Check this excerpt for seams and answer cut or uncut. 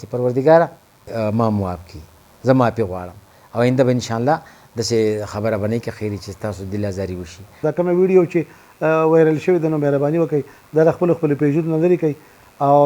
cut